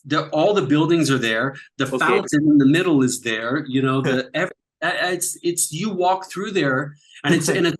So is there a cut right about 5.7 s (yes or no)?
no